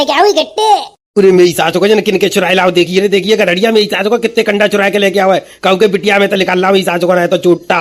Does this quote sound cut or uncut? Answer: uncut